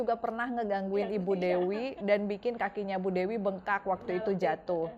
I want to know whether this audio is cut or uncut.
uncut